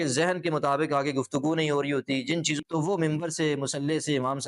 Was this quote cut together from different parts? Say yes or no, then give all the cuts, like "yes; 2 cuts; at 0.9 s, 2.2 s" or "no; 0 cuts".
yes; 1 cut; at 2.6 s